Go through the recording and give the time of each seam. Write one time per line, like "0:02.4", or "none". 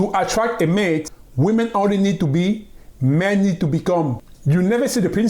0:01.1
0:04.3